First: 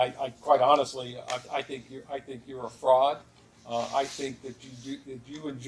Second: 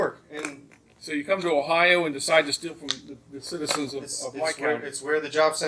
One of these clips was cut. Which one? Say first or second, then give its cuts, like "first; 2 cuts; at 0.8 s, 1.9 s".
second; 1 cut; at 2.0 s